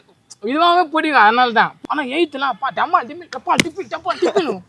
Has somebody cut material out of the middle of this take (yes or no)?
yes